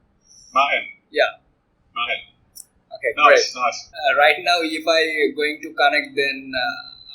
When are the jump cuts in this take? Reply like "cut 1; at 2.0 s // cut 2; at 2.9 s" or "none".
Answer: cut 1; at 3.9 s